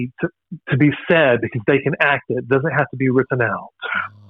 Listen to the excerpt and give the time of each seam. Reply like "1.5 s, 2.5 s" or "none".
none